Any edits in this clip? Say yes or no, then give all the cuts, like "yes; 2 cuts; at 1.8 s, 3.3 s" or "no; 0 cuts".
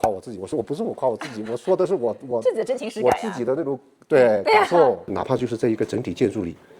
yes; 1 cut; at 5.1 s